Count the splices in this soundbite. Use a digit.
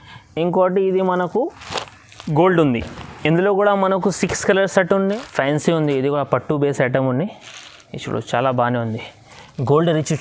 1